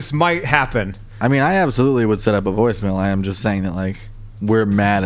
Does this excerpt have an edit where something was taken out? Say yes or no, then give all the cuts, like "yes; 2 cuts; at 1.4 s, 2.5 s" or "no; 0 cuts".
no; 0 cuts